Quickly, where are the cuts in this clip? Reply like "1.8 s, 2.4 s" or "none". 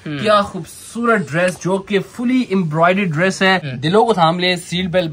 3.7 s